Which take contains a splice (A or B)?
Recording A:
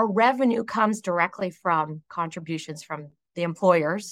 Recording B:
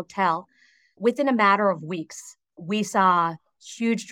B